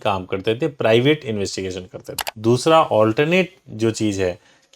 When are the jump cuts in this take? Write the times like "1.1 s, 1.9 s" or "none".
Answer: 2.3 s